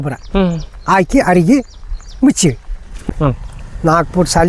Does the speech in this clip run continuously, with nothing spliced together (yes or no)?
no